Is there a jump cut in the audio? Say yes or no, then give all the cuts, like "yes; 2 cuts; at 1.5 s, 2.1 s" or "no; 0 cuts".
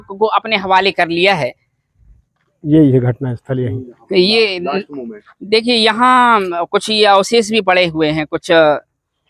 no; 0 cuts